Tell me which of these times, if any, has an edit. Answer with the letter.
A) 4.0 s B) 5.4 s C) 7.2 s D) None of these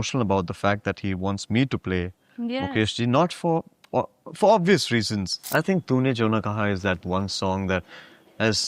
B